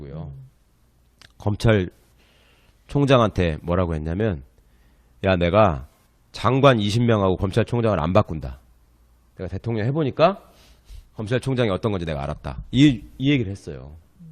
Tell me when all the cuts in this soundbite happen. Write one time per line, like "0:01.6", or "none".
none

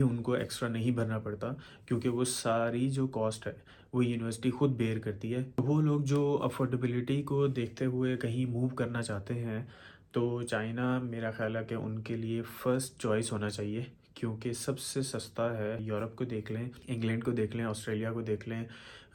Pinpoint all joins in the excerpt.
none

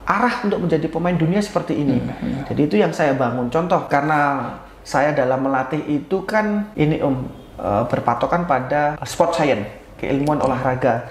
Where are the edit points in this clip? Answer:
0:03.9
0:06.7
0:09.0

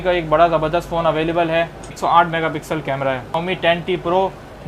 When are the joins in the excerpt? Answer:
0:01.9
0:03.4

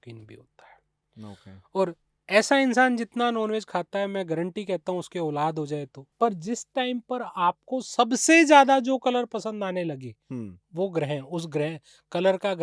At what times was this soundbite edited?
0:06.0

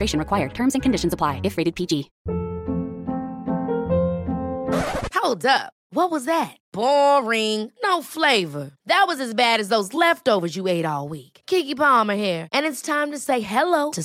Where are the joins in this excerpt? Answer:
0:02.1

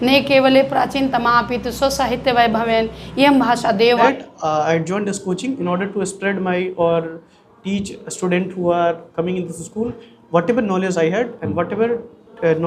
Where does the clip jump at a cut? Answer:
0:04.0

